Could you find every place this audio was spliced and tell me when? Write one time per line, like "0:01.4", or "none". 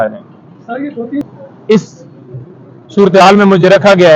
0:01.2